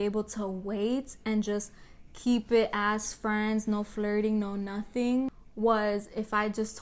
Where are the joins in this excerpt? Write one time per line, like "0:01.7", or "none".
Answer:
0:05.3